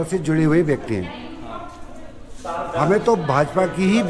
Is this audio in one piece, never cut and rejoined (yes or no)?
yes